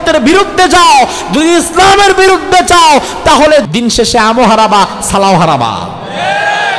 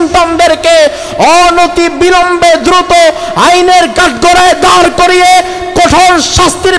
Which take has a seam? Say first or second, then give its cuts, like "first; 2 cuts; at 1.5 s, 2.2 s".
first; 1 cut; at 3.7 s